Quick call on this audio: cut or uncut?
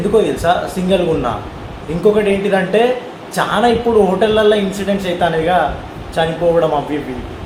uncut